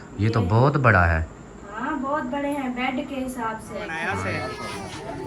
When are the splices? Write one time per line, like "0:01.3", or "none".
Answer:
0:04.0